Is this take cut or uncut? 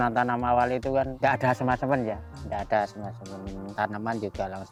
uncut